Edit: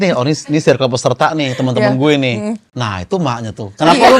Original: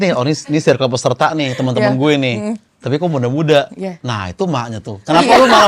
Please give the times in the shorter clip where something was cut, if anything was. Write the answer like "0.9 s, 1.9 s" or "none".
2.7 s